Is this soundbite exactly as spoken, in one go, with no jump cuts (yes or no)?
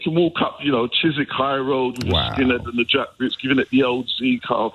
yes